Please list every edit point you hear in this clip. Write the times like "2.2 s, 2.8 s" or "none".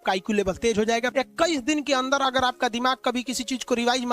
1.1 s